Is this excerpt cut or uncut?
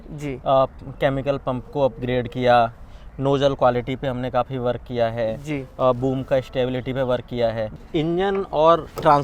cut